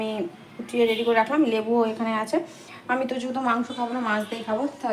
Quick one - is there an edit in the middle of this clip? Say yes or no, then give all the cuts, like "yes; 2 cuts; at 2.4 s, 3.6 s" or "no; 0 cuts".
no; 0 cuts